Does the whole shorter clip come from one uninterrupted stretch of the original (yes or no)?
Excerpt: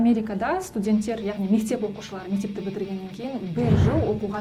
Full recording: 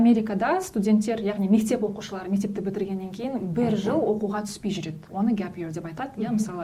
yes